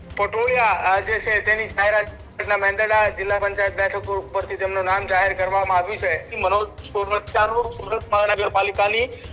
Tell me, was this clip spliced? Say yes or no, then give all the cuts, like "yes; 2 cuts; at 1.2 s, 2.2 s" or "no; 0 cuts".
yes; 1 cut; at 6.3 s